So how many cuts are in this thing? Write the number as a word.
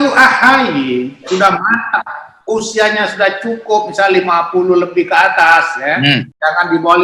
zero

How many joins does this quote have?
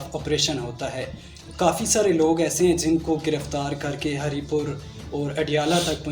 zero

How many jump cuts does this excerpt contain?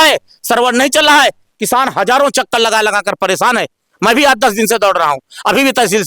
zero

